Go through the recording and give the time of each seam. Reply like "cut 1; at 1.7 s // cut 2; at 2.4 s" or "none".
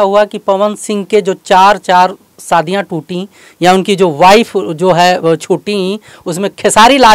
none